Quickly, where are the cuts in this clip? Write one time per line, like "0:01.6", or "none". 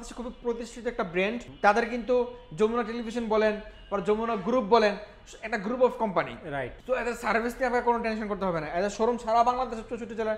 0:01.5
0:06.7